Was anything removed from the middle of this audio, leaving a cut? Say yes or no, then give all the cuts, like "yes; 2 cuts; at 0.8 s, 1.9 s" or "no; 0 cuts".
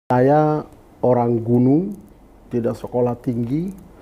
no; 0 cuts